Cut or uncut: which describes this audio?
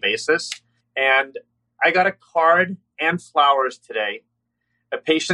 uncut